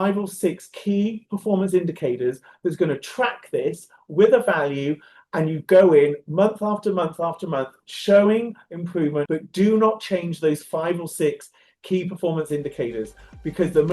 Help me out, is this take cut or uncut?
cut